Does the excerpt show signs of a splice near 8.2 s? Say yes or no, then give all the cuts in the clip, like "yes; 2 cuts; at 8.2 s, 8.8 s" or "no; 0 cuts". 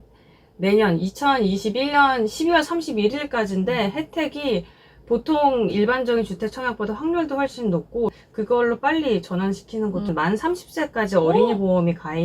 yes; 2 cuts; at 8.2 s, 10.1 s